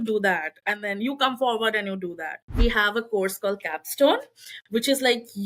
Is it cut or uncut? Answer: cut